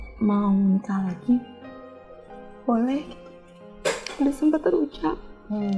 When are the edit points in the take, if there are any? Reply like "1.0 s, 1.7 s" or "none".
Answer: none